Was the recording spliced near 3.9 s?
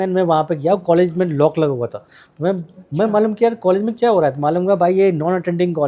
no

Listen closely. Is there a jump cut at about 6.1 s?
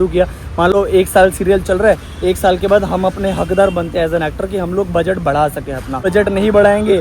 yes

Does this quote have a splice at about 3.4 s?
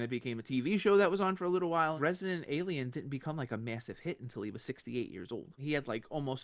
no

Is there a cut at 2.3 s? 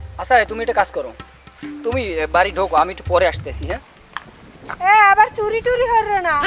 no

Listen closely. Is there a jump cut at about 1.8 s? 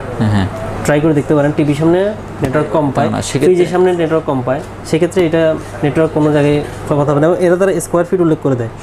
no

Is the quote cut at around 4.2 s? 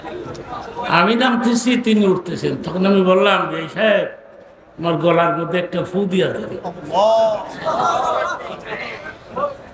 no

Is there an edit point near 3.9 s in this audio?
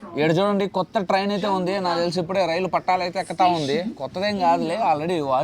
no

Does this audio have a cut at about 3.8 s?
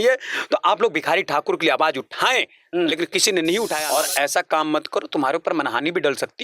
yes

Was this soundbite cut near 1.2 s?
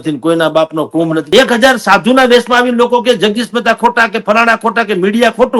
yes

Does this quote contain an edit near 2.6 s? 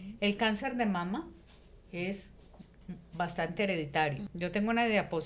no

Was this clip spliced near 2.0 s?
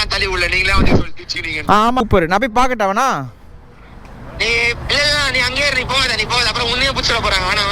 yes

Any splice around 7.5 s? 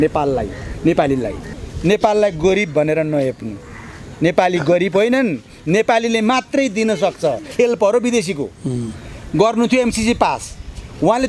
yes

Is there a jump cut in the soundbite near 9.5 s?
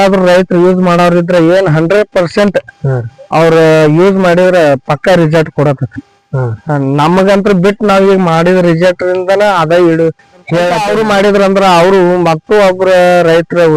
no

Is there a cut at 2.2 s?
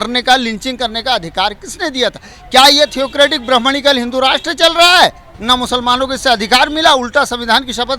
no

